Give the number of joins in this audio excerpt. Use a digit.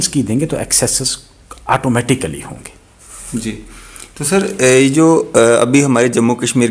0